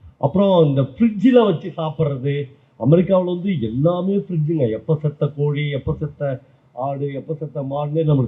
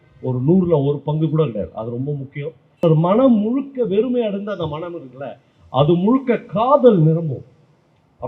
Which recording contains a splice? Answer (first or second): second